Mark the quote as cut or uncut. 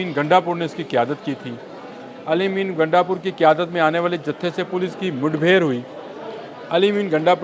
uncut